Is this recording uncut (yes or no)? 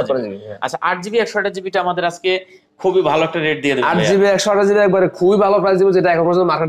yes